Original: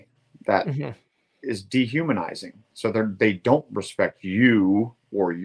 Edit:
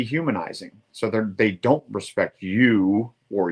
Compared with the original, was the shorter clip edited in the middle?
no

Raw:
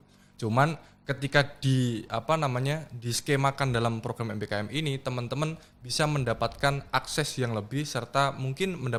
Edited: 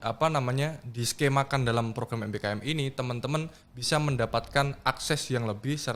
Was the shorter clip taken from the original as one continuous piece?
yes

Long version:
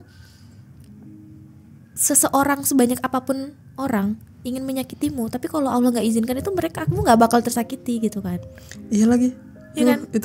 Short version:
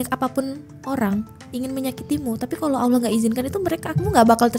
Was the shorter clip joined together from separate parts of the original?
no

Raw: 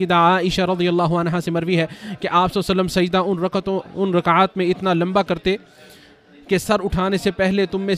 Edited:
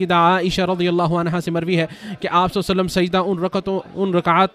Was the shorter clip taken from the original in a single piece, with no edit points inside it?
yes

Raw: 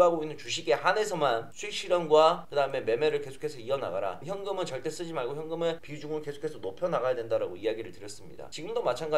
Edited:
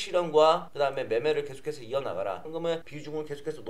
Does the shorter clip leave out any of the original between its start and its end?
yes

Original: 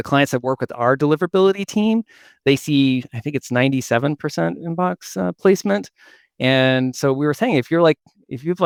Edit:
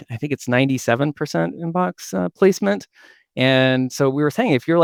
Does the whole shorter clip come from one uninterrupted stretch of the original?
yes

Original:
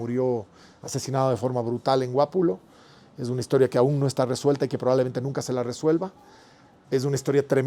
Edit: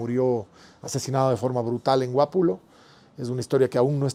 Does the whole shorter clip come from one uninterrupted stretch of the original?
yes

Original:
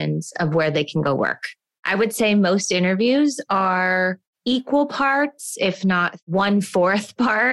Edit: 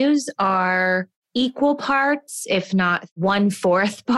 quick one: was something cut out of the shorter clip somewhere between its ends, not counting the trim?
no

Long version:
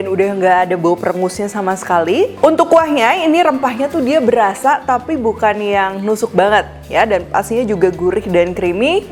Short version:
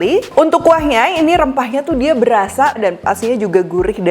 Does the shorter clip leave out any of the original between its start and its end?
yes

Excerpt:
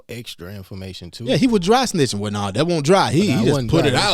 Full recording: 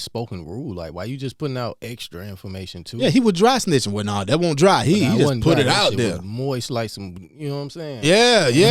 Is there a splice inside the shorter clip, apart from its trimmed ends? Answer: no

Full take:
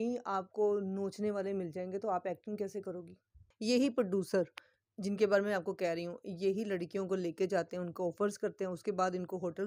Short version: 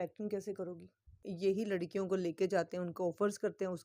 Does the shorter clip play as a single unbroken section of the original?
no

